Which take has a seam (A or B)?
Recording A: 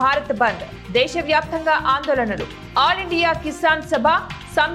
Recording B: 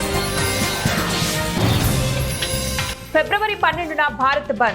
B